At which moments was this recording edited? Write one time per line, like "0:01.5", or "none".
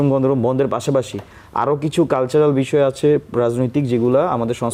none